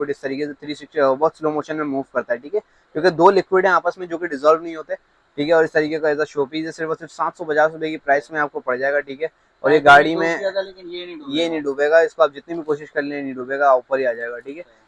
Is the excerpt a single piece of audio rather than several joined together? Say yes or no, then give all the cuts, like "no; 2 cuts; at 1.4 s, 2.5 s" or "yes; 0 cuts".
yes; 0 cuts